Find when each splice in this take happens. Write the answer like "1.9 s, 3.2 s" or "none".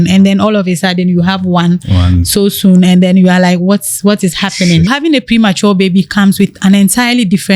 4.9 s